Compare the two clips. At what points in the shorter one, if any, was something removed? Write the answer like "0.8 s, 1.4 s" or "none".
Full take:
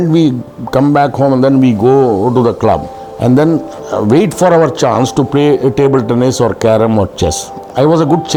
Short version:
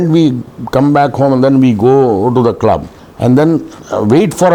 none